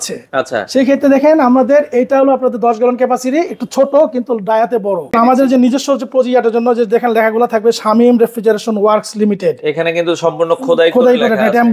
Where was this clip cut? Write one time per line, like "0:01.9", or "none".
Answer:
0:05.1